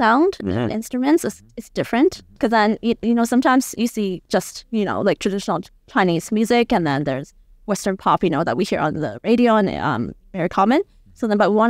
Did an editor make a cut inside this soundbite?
yes; 1 cut; at 2.3 s

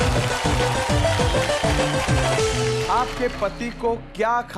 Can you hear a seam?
yes; 1 cut; at 2.8 s

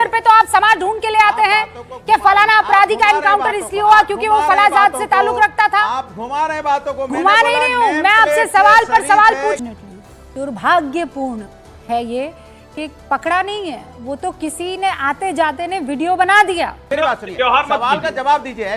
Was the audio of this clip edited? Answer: yes; 2 cuts; at 9.6 s, 16.9 s

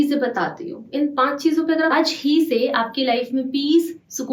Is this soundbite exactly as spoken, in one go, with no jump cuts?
no; 1 cut; at 1.9 s

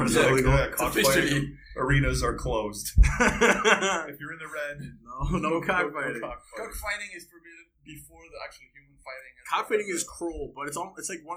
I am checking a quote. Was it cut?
no; 0 cuts

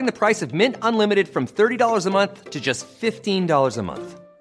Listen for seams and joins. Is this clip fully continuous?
yes; 0 cuts

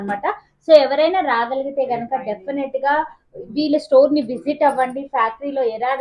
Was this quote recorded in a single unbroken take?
yes; 0 cuts

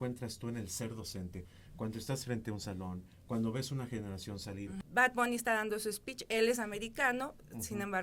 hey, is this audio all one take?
no; 1 cut; at 4.7 s

